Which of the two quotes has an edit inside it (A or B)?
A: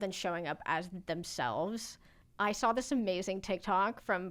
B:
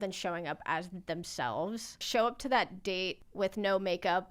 B